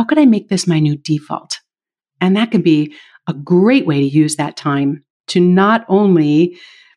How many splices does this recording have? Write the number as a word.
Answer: zero